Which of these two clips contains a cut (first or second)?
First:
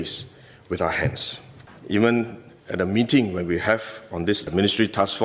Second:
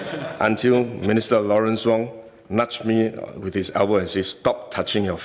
first